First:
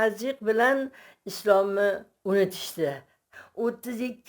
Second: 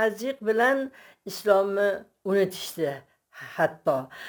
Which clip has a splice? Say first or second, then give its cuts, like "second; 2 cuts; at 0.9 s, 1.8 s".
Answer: first; 1 cut; at 3.4 s